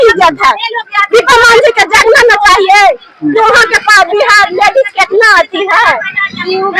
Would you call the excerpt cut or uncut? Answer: uncut